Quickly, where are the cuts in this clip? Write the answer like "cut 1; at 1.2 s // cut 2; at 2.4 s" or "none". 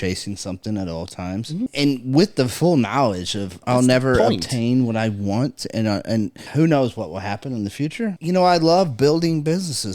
cut 1; at 1.7 s // cut 2; at 3.6 s // cut 3; at 6.4 s // cut 4; at 8.2 s